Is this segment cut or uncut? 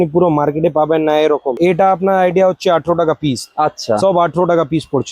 cut